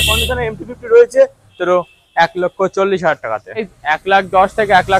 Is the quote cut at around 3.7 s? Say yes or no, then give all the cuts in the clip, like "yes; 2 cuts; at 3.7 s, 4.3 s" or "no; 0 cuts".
yes; 2 cuts; at 1.5 s, 3.7 s